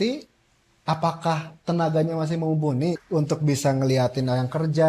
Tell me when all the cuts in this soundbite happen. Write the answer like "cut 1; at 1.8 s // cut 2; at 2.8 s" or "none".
cut 1; at 3.0 s